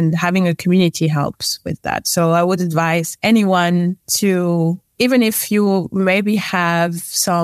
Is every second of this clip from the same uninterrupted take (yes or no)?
no